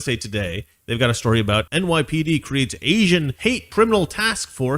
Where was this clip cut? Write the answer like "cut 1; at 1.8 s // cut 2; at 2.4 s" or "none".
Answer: cut 1; at 1.7 s // cut 2; at 3.6 s